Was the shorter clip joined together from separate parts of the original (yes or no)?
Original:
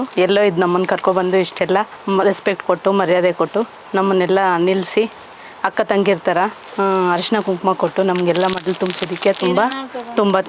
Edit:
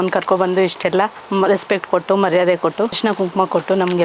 yes